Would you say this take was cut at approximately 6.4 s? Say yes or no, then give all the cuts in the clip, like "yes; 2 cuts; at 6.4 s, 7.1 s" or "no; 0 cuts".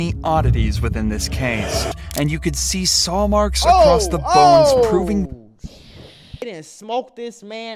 yes; 2 cuts; at 1.9 s, 6.4 s